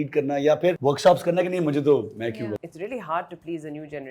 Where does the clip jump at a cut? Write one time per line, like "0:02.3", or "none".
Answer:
0:00.8
0:02.5